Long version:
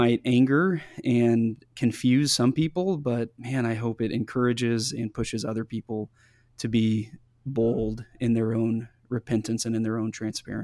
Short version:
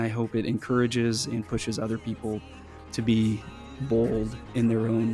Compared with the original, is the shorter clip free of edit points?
yes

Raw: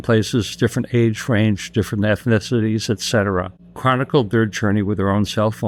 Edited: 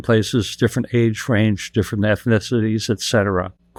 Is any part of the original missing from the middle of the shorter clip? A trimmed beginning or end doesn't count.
no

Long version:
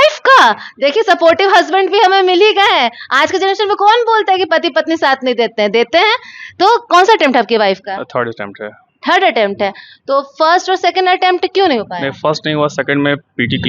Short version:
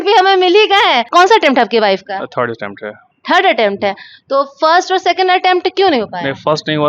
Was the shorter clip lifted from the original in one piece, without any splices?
no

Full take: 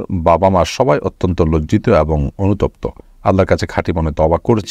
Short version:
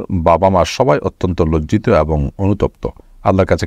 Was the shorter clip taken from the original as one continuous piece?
yes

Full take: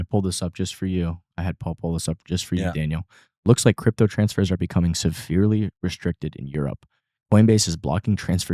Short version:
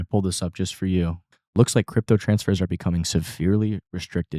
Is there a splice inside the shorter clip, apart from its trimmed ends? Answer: yes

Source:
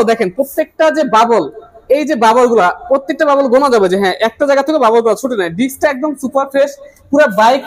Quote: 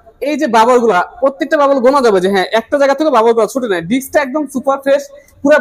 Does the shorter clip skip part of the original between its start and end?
no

